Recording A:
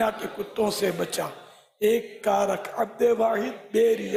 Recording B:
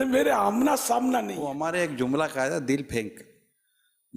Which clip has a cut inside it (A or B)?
B